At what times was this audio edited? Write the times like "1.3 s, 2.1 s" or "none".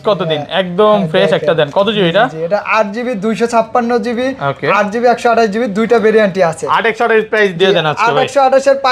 none